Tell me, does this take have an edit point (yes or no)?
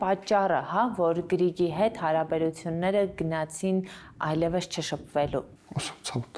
no